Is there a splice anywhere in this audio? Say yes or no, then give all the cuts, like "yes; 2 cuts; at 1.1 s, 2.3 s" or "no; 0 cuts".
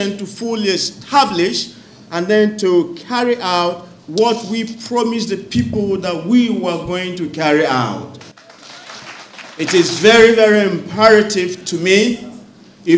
yes; 1 cut; at 9.1 s